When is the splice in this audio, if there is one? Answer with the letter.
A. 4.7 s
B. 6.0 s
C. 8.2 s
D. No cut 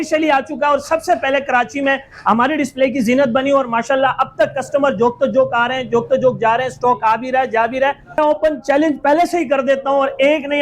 C